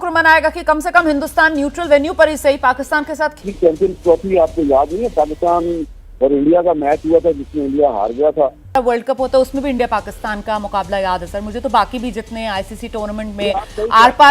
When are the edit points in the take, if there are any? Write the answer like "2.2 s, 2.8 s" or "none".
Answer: 3.4 s, 8.7 s